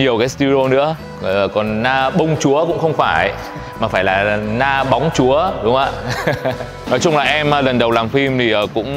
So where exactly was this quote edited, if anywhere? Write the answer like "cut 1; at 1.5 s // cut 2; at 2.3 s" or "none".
cut 1; at 1.1 s // cut 2; at 6.8 s